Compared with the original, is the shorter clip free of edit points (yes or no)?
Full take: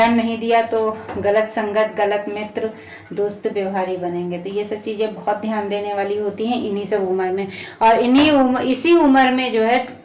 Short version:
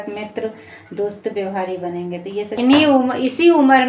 no